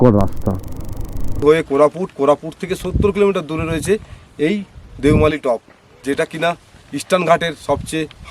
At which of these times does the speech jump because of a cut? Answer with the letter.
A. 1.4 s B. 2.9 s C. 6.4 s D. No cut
A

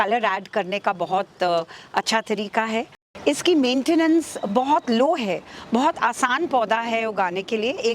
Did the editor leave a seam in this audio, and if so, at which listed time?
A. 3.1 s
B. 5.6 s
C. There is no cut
A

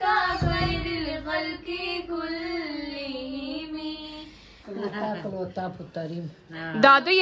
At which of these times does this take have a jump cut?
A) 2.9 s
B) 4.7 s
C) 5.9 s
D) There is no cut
B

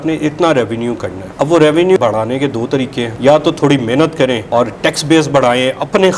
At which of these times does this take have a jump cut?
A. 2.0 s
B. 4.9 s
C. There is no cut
A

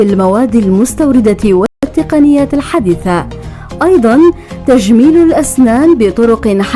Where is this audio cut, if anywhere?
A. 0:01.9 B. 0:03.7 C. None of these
A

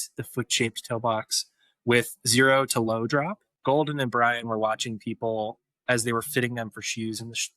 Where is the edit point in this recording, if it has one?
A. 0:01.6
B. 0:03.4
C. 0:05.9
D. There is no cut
B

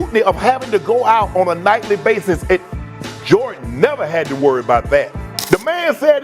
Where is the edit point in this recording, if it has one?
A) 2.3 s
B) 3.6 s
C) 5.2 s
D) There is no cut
C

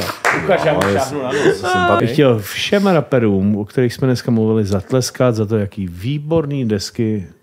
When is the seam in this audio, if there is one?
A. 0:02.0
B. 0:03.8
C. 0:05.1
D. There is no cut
A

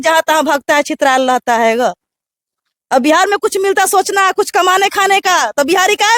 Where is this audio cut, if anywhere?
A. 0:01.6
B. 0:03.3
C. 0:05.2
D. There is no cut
D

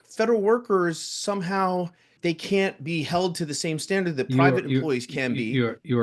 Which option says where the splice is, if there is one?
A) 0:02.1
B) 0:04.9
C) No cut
A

